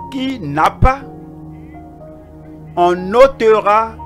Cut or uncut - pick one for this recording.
uncut